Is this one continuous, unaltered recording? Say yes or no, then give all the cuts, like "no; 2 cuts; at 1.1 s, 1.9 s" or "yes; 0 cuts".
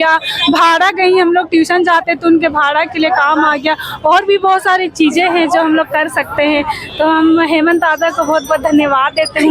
yes; 0 cuts